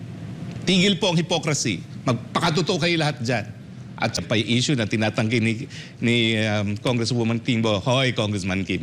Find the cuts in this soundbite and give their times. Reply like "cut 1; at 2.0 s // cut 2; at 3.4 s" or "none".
cut 1; at 4.1 s